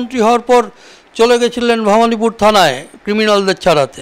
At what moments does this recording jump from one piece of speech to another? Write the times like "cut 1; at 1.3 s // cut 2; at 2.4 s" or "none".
none